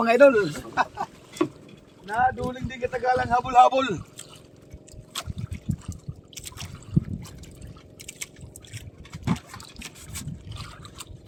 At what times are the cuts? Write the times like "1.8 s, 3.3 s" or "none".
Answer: none